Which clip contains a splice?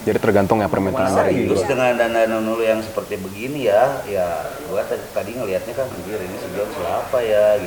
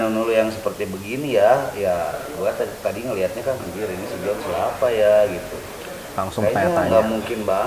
first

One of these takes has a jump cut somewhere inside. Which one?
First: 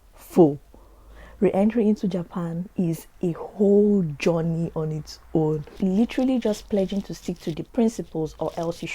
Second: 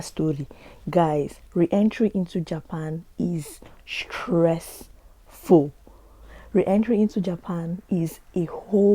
first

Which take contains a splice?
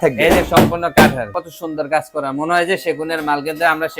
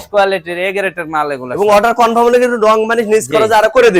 first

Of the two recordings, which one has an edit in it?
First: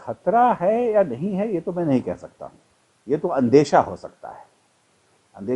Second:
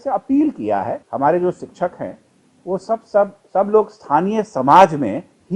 second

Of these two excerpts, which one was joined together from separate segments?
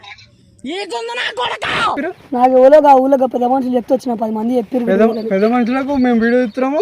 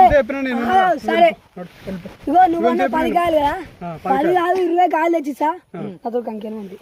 first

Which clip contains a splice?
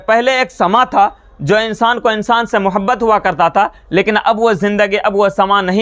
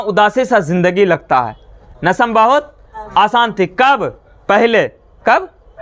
second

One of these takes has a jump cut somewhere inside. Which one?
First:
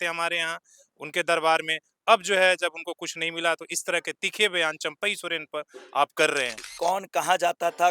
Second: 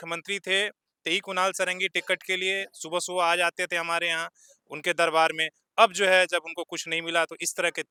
first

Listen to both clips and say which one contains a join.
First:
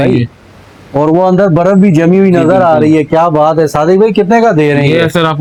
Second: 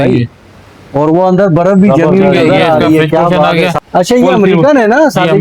second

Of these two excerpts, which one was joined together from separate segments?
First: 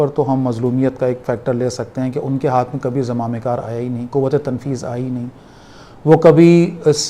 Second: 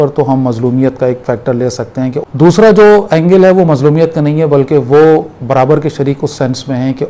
second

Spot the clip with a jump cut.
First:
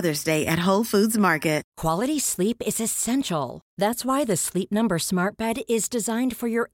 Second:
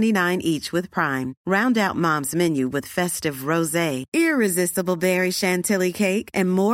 first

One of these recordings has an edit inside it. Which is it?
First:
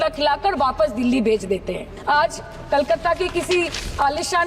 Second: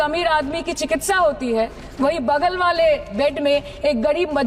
first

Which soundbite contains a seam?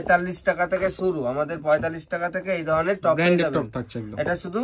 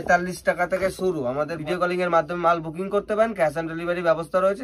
second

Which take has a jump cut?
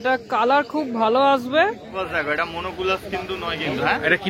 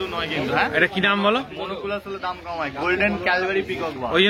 first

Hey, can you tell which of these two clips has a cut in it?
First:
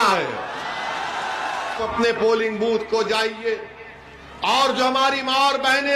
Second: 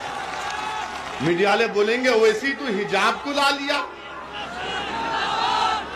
first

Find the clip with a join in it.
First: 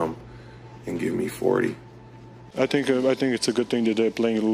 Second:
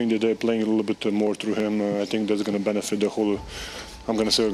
first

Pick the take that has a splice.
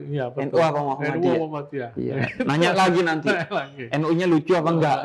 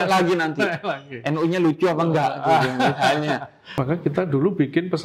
second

